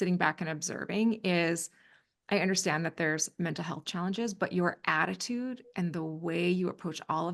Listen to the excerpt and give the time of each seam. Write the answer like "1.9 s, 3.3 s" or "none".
none